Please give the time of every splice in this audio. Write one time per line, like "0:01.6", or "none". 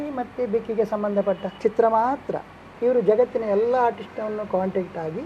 0:01.6
0:02.6